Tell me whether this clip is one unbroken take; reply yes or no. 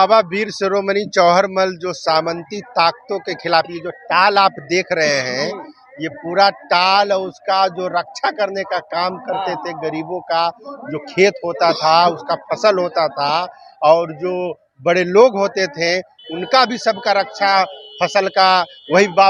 yes